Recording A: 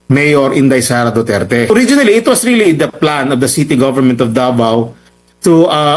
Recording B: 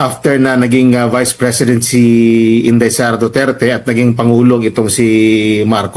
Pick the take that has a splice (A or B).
A